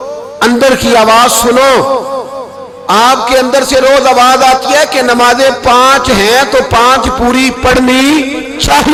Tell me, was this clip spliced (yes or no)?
no